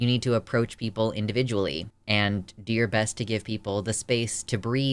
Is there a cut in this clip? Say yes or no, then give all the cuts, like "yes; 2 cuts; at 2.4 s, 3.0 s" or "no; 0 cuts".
no; 0 cuts